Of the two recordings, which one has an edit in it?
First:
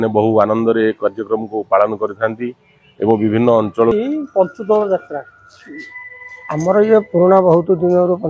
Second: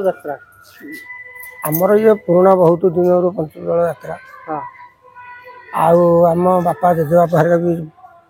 first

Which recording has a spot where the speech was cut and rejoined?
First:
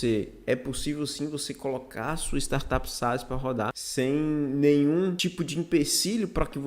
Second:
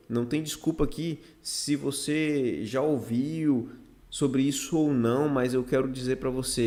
first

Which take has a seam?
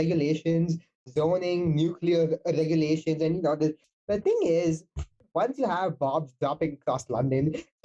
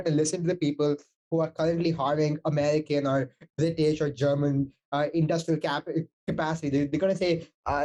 first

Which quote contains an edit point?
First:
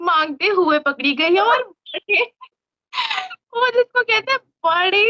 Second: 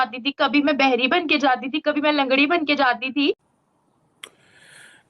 second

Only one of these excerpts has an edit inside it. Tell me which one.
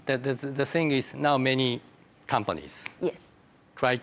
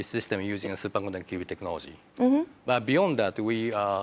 second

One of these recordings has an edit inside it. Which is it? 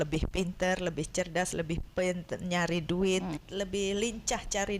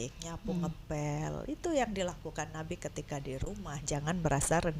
first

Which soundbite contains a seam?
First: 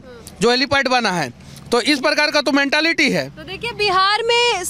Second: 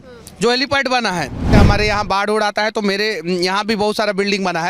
second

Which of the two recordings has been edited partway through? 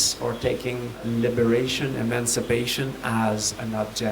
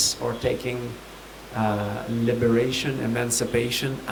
first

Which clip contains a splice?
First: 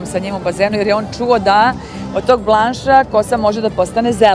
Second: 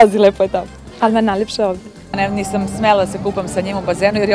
second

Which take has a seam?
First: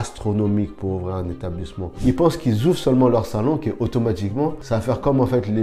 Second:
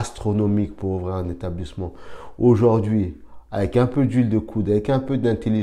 first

